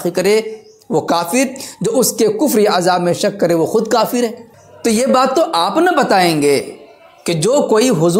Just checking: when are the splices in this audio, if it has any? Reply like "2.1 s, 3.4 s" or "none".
none

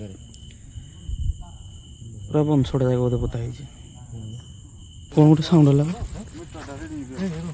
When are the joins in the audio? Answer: 5.1 s

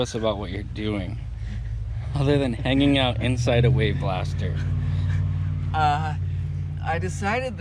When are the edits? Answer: none

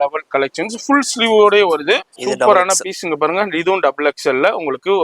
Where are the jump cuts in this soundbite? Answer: 2.1 s

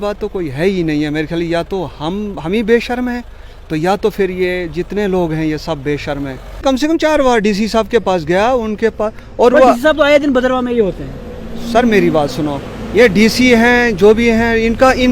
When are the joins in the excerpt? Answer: 6.6 s

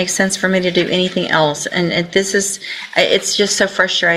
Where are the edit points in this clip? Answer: none

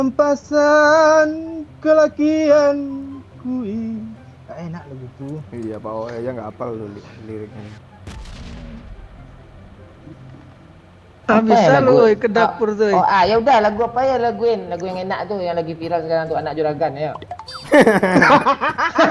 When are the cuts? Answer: none

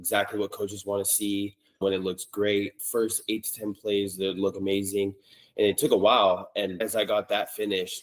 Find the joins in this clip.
1.8 s, 2.8 s, 6.8 s

